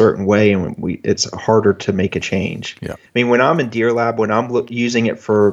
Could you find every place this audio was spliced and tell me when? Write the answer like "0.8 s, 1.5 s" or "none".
2.9 s